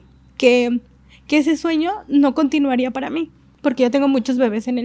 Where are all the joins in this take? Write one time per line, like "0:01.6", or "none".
0:03.5